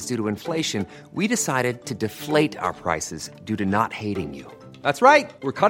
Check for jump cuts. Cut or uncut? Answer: uncut